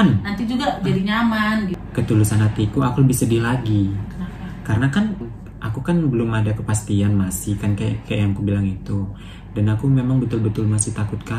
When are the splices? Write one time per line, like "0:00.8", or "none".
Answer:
0:01.8
0:05.3